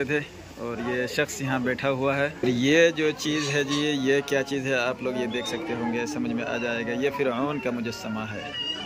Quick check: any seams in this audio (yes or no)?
yes